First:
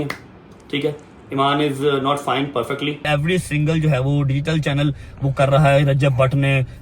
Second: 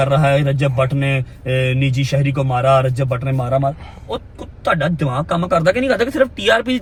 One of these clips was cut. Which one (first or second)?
first